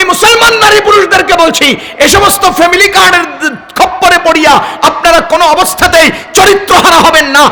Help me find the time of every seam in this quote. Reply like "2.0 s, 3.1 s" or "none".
none